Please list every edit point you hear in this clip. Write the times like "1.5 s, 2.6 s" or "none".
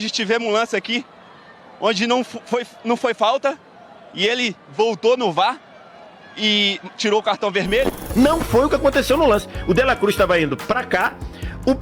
8.0 s